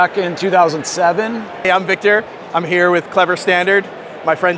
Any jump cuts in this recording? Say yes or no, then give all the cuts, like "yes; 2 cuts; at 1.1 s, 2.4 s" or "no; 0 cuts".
yes; 1 cut; at 1.5 s